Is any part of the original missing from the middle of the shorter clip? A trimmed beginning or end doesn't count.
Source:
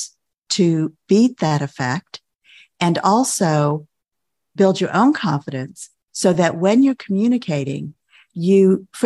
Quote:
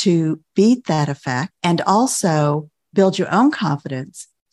yes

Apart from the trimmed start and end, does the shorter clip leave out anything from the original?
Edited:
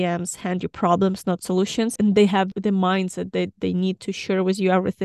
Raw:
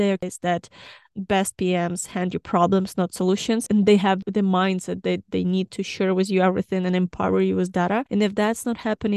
no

